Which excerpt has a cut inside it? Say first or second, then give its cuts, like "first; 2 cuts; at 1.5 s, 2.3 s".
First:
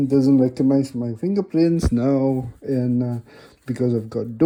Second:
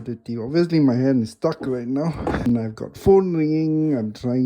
second; 1 cut; at 2.5 s